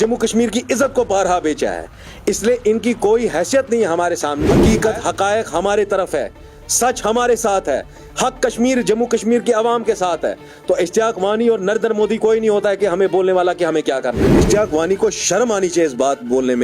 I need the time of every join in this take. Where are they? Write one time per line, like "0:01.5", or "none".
0:04.6
0:14.3